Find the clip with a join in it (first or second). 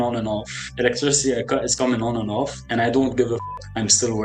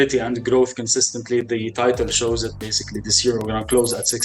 first